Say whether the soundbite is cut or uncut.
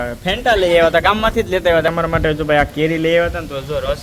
cut